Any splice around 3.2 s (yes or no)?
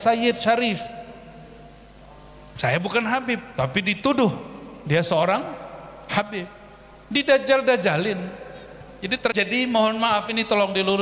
no